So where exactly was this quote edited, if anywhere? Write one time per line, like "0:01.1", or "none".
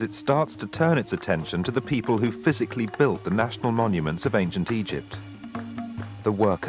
none